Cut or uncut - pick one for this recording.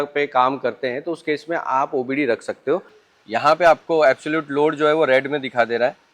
cut